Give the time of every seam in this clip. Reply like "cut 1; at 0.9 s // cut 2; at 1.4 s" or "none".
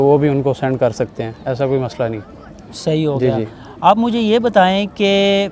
none